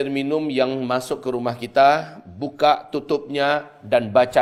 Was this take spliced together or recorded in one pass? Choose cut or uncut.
uncut